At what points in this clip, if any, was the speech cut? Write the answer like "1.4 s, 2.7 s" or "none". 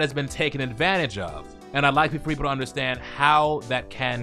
none